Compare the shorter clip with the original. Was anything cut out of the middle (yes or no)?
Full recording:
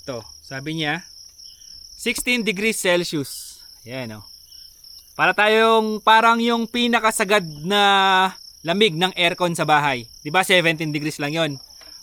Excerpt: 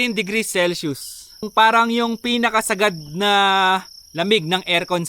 yes